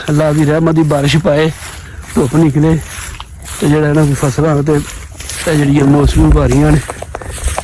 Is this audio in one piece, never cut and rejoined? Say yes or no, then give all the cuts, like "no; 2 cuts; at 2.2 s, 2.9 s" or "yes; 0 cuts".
yes; 0 cuts